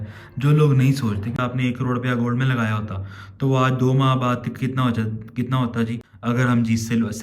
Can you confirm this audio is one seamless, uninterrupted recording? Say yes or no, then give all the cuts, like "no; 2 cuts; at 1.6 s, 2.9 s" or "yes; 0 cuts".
no; 2 cuts; at 1.3 s, 6.0 s